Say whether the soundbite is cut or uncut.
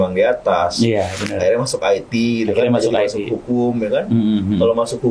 uncut